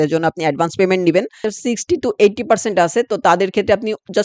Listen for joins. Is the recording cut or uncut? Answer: cut